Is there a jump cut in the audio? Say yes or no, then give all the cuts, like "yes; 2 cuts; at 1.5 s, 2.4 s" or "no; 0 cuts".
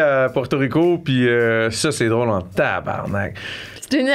no; 0 cuts